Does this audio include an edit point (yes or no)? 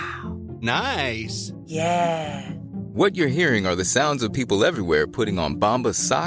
no